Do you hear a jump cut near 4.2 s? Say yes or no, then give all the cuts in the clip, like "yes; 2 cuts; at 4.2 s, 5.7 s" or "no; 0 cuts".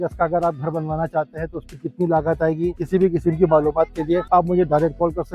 yes; 2 cuts; at 2.8 s, 4.2 s